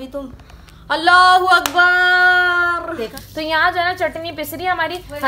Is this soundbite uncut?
no; 1 cut; at 3.1 s

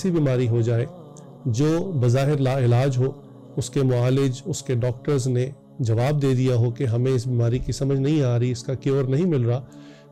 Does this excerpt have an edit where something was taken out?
no; 0 cuts

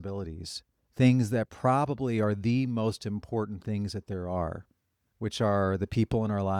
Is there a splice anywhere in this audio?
no; 0 cuts

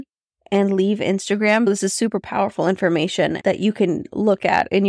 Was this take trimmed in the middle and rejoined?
yes; 2 cuts; at 1.7 s, 3.4 s

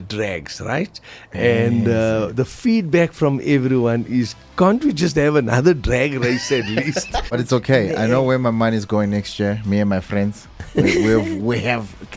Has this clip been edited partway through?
yes; 1 cut; at 7.4 s

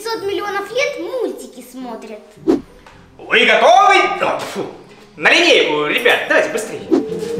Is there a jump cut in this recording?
no; 0 cuts

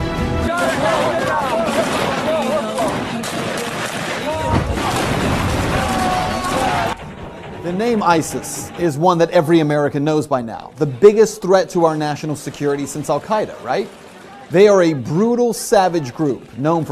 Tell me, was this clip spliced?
yes; 1 cut; at 13.9 s

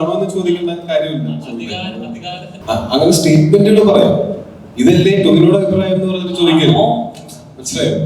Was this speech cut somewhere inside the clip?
yes; 1 cut; at 2.5 s

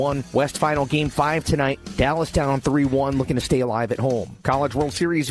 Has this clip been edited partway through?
yes; 1 cut; at 4.3 s

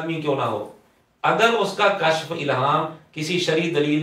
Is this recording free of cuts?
yes; 0 cuts

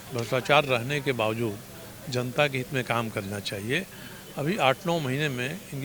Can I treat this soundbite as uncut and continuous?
yes; 0 cuts

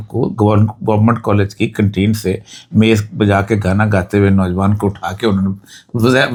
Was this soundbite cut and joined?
no; 0 cuts

